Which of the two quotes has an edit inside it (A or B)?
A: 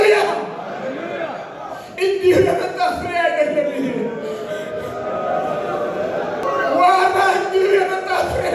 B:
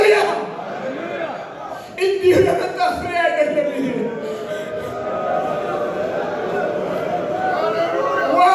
A